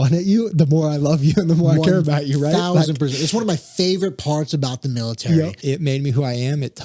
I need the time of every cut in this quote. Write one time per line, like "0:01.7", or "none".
0:05.6